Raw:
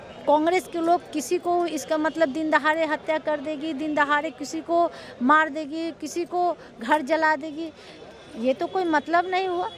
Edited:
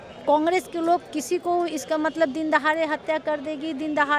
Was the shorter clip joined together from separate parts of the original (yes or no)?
no